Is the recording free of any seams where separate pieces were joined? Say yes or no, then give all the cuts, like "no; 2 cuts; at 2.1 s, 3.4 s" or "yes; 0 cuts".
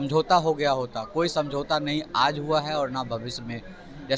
yes; 0 cuts